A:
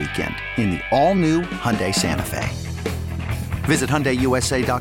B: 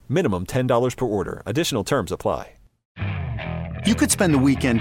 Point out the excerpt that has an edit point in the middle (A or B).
B